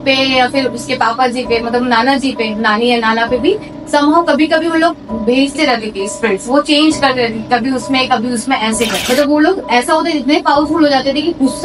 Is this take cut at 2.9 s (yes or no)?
no